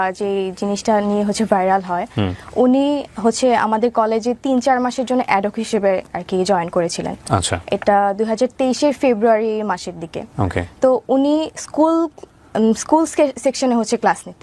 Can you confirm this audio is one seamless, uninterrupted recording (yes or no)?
yes